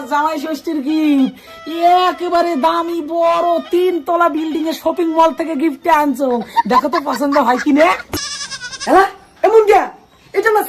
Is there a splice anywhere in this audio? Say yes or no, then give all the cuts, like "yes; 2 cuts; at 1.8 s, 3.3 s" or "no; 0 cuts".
yes; 1 cut; at 8.1 s